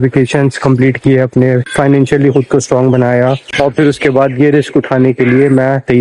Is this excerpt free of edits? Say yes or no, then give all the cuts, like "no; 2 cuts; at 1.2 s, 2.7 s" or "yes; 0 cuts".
yes; 0 cuts